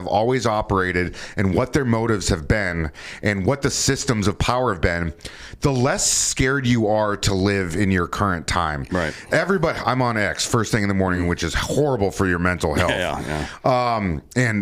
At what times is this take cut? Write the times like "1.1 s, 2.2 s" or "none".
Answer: none